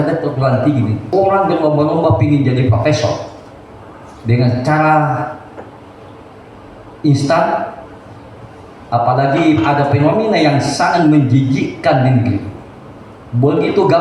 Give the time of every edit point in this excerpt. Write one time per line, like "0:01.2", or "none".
0:01.0